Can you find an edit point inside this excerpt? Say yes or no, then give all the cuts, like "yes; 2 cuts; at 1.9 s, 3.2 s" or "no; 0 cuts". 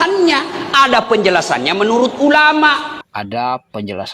yes; 1 cut; at 3.0 s